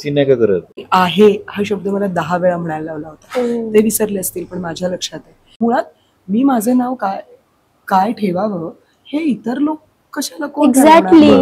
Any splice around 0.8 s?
yes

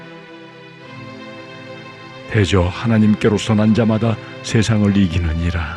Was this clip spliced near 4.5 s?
no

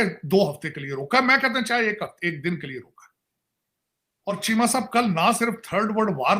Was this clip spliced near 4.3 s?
yes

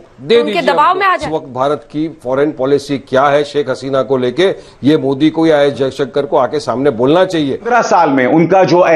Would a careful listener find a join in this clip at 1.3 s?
yes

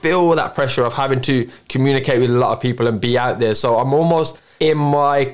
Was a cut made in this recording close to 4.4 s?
yes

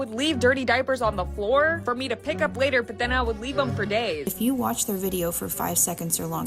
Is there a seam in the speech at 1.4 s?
no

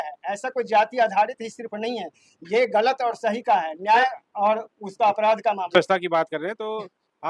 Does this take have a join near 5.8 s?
yes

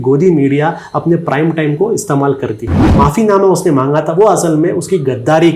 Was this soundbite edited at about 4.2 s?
no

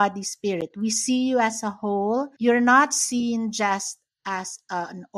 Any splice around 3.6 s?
no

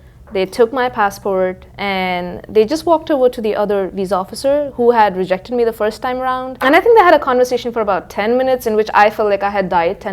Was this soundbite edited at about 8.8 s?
no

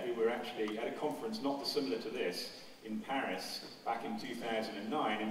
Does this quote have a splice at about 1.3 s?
no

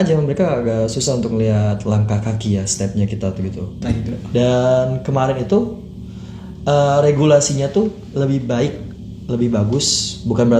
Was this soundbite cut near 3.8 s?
yes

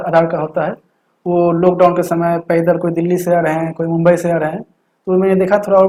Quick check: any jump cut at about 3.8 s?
no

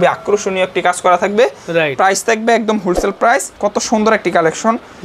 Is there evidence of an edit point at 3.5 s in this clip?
yes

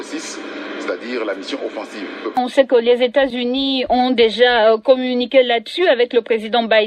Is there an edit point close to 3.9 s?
no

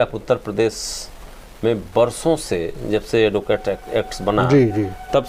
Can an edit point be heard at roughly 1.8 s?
no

